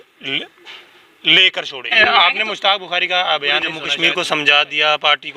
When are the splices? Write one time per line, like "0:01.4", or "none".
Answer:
0:01.9
0:03.8